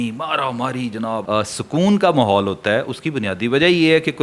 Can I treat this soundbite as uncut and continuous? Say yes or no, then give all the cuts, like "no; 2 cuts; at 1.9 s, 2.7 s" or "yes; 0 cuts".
no; 1 cut; at 1.2 s